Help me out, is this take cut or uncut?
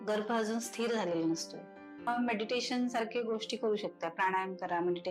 cut